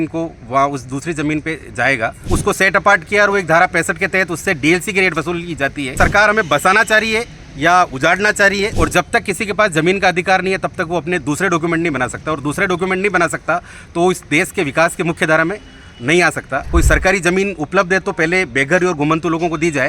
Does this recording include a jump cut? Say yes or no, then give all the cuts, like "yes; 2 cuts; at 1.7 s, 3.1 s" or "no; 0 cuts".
yes; 4 cuts; at 2.2 s, 5.9 s, 8.7 s, 16.7 s